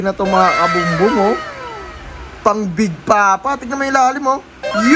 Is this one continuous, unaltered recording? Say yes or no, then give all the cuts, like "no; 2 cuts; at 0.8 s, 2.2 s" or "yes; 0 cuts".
yes; 0 cuts